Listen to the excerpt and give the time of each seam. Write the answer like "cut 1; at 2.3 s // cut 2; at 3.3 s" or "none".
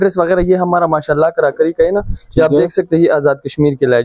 none